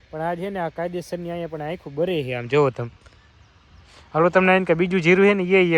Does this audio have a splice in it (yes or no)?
no